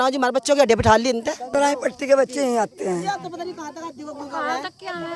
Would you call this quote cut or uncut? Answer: uncut